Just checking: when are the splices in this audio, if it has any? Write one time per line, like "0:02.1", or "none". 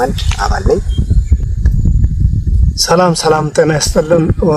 0:01.4